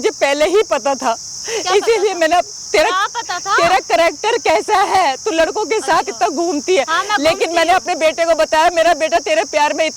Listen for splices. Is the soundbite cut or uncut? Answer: uncut